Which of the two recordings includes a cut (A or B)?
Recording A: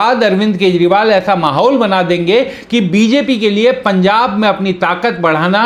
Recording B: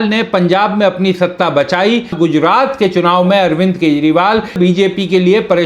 B